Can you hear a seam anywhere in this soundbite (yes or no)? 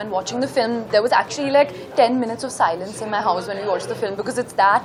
no